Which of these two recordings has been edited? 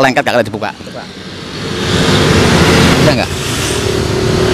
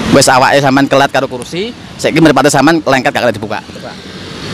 first; 1 cut; at 3.1 s

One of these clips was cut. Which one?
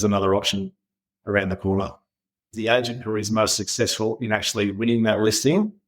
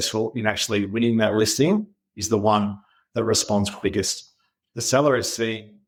first; 1 cut; at 2.4 s

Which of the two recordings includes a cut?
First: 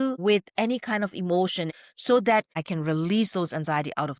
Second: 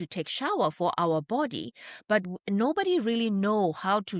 first; 2 cuts; at 1.8 s, 2.6 s

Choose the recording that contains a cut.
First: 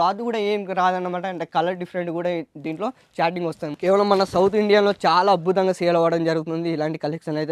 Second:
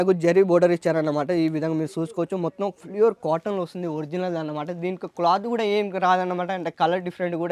first; 1 cut; at 3.7 s

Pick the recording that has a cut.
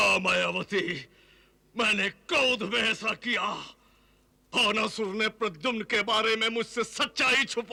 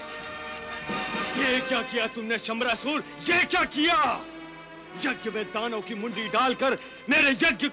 second; 1 cut; at 1.3 s

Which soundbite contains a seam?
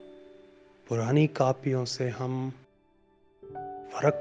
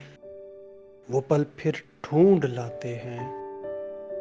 second; 1 cut; at 3.2 s

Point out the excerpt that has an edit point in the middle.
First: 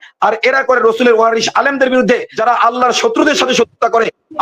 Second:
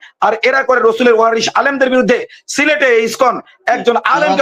first; 1 cut; at 2.3 s

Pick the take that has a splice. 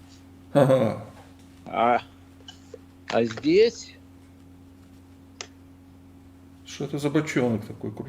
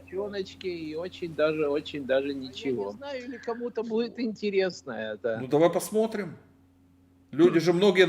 second; 1 cut; at 3.3 s

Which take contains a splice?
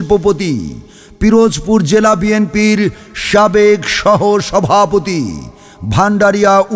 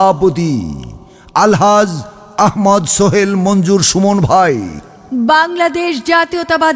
second; 1 cut; at 5.1 s

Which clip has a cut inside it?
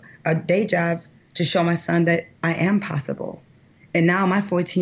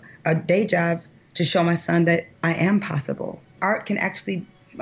second; 1 cut; at 3.6 s

